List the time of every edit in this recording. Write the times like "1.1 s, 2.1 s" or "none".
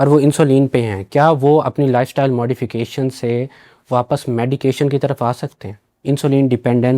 none